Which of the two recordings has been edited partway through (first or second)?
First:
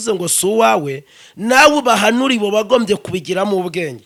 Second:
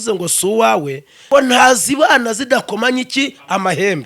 second